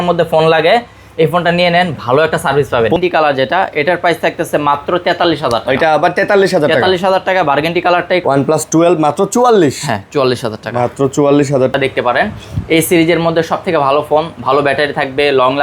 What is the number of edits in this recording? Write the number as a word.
three